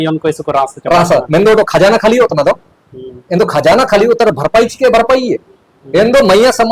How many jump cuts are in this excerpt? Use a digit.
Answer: 0